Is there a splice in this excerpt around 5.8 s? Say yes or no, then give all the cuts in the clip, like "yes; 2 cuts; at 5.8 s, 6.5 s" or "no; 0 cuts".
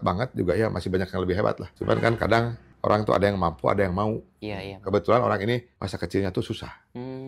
yes; 3 cuts; at 1.7 s, 2.6 s, 5.8 s